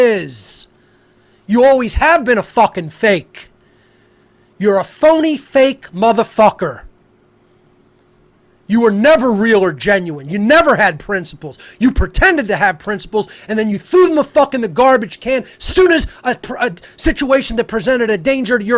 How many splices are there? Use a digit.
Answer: 1